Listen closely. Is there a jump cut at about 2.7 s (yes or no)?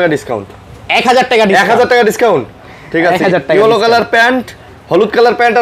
no